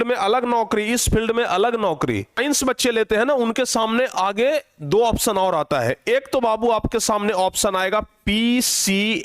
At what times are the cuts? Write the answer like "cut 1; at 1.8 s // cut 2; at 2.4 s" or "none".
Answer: cut 1; at 2.3 s